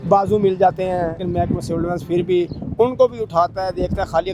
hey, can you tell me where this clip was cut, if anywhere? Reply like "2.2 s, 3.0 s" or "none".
1.2 s